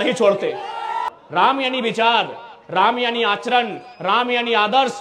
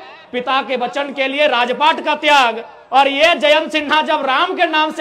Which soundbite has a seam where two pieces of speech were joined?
first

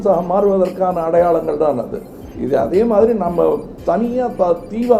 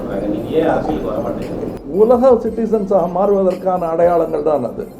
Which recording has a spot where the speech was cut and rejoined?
second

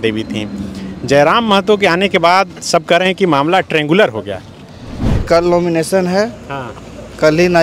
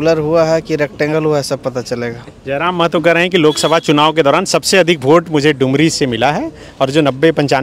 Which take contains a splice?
first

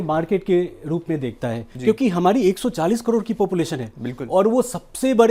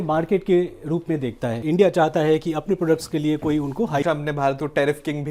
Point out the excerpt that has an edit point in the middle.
second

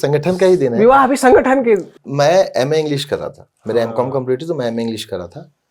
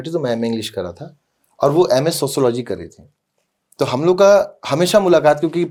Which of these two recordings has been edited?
first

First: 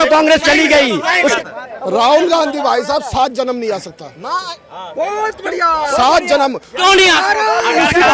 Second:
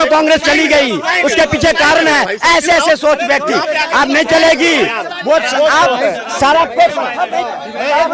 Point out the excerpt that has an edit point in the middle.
first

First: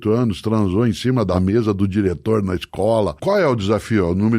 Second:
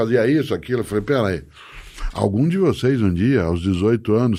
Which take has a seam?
first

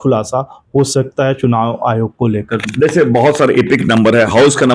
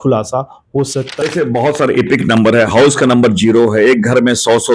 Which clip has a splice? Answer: second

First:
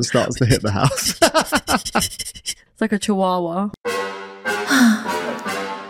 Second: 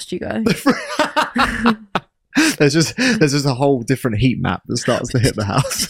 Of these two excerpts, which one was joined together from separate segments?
first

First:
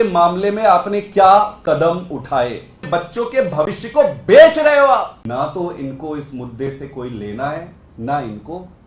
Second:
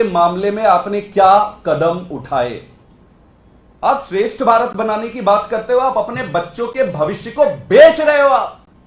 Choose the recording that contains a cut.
first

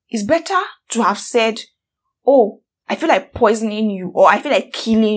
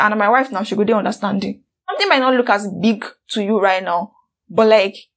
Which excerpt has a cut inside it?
second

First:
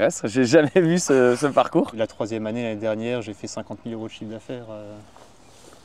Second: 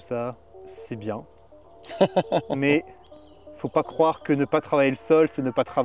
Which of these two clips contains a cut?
first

